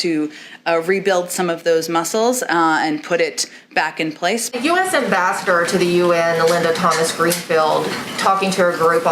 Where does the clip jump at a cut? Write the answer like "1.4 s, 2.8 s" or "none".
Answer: 4.5 s

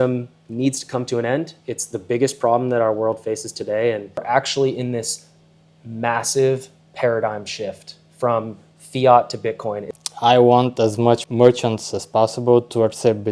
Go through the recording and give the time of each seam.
4.2 s, 9.9 s, 11.2 s

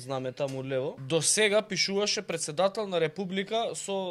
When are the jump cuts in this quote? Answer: 1.0 s

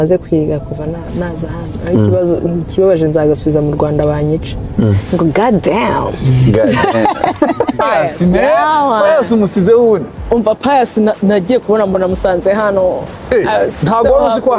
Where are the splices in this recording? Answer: 7.8 s

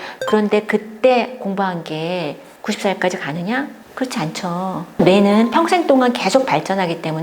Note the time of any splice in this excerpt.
2.5 s, 3.8 s, 5.0 s

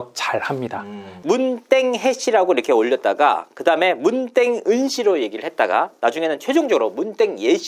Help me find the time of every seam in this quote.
1.1 s

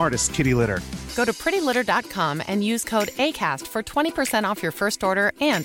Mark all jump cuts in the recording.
none

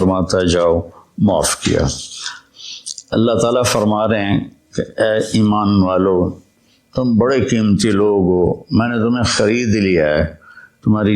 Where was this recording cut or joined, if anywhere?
2.4 s

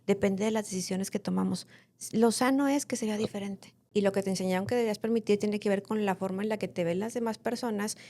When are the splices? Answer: 3.7 s

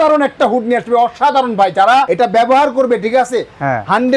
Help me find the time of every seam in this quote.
2.1 s

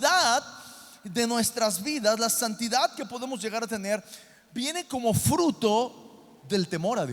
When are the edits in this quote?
none

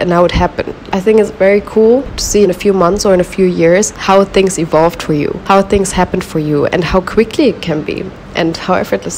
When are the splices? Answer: 0.9 s, 2.3 s, 3.9 s, 5.4 s

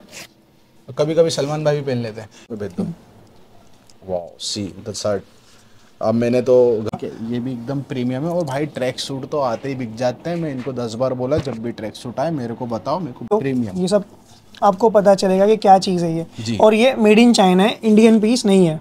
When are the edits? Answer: 2.5 s, 7.0 s, 13.3 s

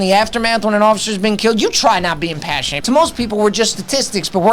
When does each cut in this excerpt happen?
2.7 s

